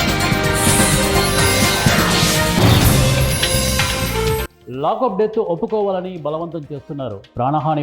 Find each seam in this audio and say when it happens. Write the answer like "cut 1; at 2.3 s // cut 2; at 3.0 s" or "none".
cut 1; at 4.5 s